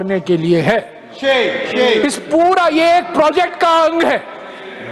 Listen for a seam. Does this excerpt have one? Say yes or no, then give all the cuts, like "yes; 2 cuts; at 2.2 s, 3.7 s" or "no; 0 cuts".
no; 0 cuts